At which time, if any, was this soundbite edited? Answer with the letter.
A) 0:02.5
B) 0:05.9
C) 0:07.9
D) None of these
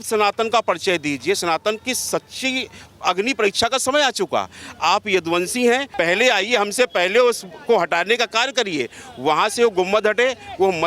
B